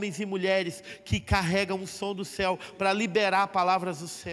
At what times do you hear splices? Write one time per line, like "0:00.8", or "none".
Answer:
none